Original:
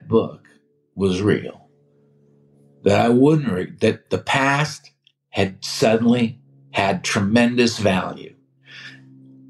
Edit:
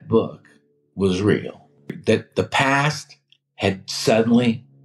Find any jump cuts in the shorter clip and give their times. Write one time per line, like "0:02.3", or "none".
0:02.0